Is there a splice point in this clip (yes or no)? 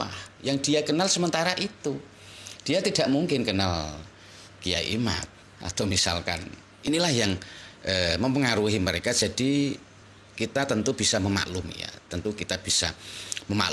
yes